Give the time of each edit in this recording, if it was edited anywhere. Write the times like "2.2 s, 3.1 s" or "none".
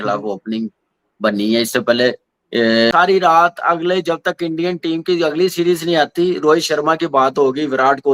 2.9 s